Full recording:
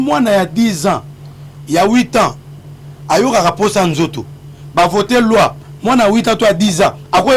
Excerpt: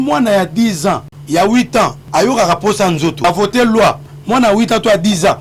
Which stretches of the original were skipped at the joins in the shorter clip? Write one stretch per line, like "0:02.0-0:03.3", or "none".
0:01.1-0:01.5
0:02.4-0:03.0
0:04.2-0:04.8